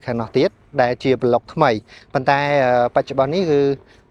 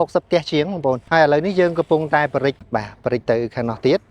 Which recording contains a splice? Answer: second; 2 cuts; at 1.0 s, 2.6 s

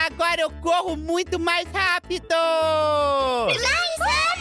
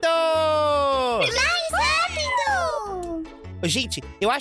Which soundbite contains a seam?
second; 1 cut; at 3.3 s

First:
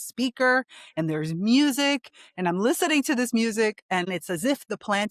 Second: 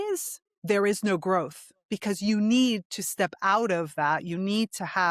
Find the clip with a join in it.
first; 1 cut; at 4.1 s

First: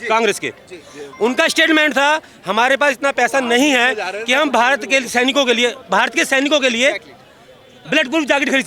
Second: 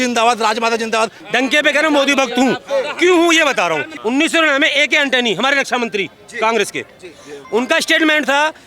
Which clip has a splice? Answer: second; 2 cuts; at 1.2 s, 3.9 s

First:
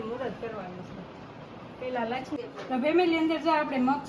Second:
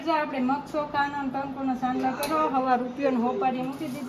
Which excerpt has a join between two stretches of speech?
first; 1 cut; at 2.4 s

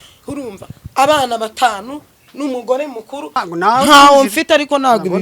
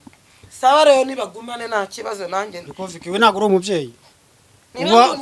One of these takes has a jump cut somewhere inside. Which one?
first; 1 cut; at 3.4 s

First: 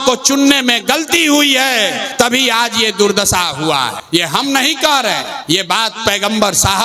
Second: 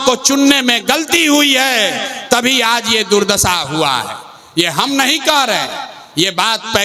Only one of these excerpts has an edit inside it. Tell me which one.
first; 3 cuts; at 2.0 s, 4.0 s, 5.3 s

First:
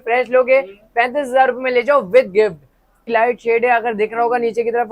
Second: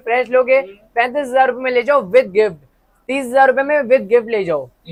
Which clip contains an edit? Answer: first; 1 cut; at 3.0 s

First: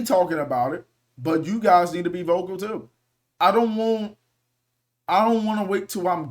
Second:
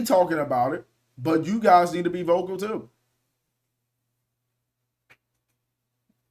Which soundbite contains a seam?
first; 1 cut; at 3.2 s

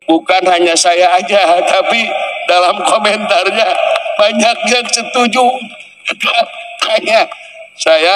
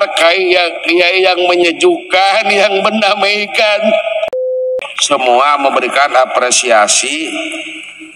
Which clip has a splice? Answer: second; 1 cut; at 4.5 s

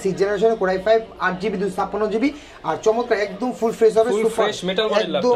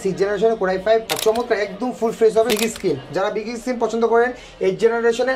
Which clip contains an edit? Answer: second; 2 cuts; at 1.1 s, 2.5 s

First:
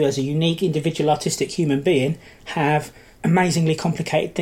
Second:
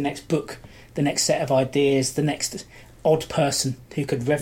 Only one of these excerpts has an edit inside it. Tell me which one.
first; 1 cut; at 3.0 s

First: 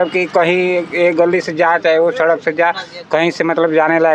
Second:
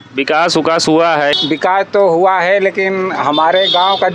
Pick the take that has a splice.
second; 1 cut; at 1.3 s

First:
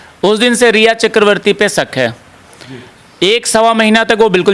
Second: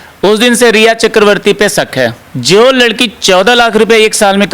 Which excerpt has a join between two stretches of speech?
second; 1 cut; at 2.3 s

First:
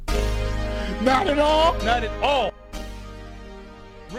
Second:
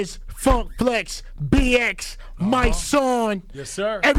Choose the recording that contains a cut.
first; 1 cut; at 2.5 s

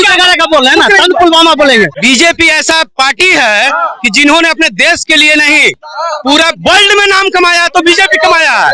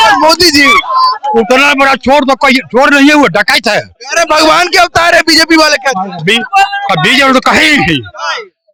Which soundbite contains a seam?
first; 1 cut; at 1.9 s

